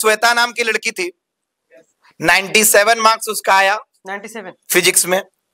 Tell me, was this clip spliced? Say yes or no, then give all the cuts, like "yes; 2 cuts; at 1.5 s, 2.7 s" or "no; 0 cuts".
no; 0 cuts